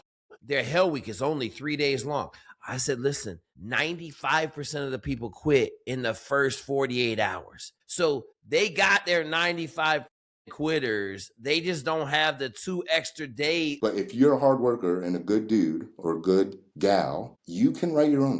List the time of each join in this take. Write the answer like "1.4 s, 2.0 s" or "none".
13.7 s